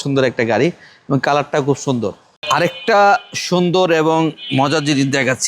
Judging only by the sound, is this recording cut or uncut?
cut